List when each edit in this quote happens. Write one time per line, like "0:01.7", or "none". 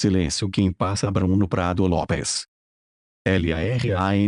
0:02.1